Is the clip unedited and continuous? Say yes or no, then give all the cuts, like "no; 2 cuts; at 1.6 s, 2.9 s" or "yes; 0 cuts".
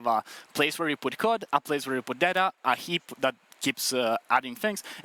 yes; 0 cuts